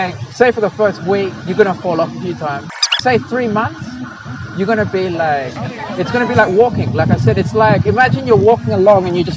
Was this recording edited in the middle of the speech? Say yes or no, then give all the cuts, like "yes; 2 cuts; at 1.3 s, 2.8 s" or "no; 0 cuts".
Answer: yes; 1 cut; at 2.9 s